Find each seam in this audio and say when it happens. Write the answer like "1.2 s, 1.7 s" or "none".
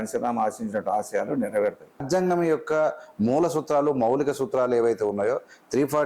2.0 s